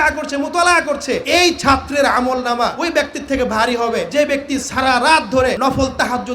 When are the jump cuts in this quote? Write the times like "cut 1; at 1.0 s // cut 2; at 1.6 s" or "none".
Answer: cut 1; at 1.2 s // cut 2; at 2.8 s // cut 3; at 4.1 s // cut 4; at 5.6 s